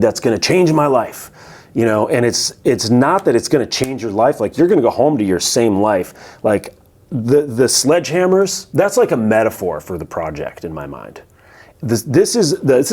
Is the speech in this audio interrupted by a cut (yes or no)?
yes